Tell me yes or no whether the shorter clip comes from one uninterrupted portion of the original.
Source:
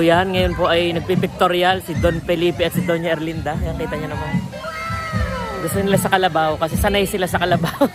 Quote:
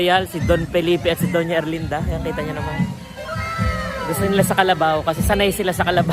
yes